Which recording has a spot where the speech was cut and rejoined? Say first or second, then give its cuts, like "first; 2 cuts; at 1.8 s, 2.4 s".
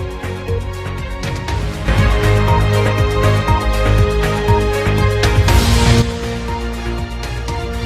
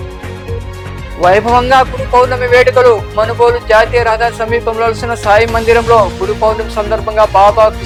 first; 1 cut; at 1.1 s